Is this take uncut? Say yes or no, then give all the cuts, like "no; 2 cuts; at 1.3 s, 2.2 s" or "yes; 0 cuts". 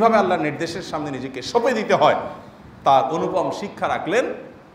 yes; 0 cuts